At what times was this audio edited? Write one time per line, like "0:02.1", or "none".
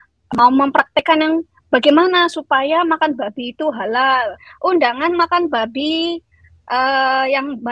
0:04.5